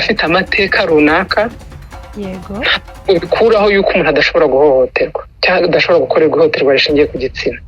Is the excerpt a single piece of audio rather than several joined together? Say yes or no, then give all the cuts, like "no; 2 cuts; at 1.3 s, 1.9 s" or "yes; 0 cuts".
yes; 0 cuts